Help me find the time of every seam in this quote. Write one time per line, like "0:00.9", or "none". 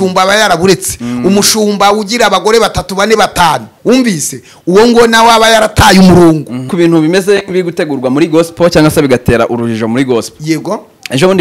0:06.7

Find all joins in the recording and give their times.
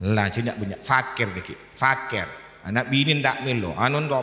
none

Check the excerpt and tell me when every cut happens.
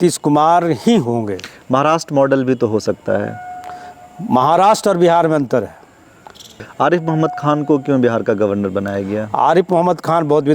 0:06.6

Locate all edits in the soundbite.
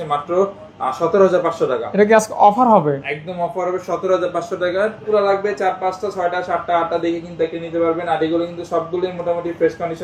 0:05.1

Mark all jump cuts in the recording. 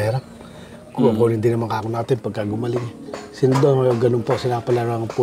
none

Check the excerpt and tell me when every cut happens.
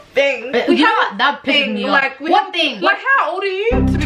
0:02.7

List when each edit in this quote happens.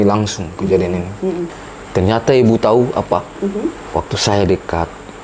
0:01.5

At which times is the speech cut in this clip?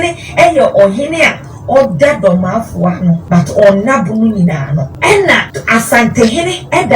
0:03.2
0:04.9
0:05.5

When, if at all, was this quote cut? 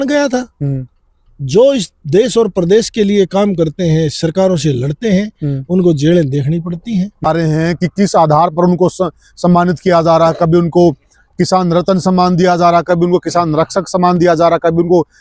0:07.3

